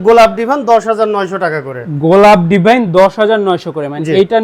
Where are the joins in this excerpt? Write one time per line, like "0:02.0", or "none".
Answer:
none